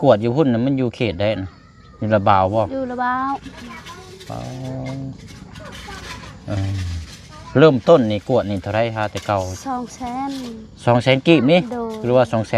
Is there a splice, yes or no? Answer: no